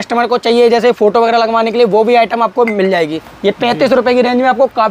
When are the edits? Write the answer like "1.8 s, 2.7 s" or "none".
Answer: 3.3 s